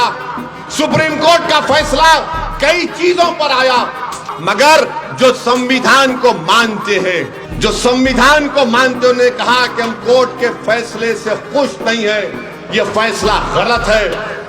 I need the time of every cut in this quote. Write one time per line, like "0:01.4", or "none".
0:04.2
0:07.4